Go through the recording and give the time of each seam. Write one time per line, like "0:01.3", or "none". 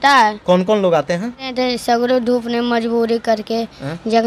0:01.5